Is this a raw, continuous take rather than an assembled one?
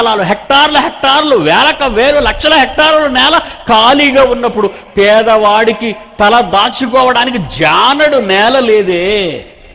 yes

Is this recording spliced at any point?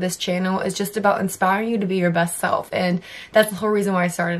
no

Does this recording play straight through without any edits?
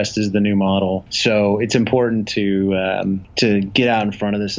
no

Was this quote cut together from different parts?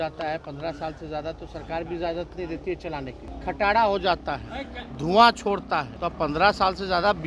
yes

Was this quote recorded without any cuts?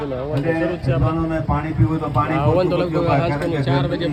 yes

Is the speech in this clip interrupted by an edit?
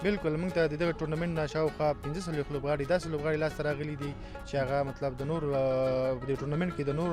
no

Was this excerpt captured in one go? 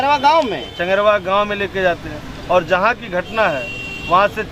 yes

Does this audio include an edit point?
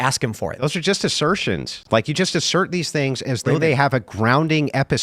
no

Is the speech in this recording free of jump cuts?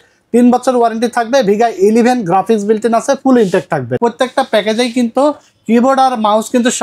no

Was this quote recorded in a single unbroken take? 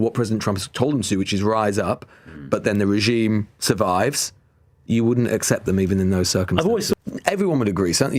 no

